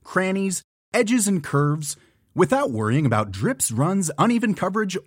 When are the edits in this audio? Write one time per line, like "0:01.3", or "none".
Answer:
none